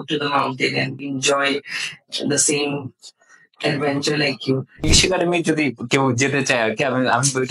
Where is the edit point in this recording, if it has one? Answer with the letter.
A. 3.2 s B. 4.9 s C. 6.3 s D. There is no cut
B